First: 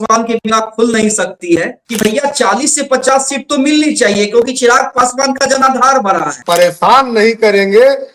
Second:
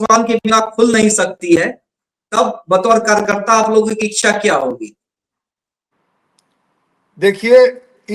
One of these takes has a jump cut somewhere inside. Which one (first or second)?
first